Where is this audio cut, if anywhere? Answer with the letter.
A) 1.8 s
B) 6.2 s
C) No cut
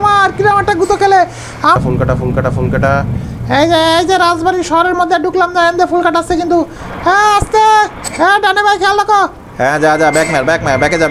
A